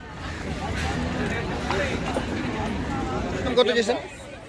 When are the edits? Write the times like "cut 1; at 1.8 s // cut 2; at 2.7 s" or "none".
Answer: cut 1; at 3.5 s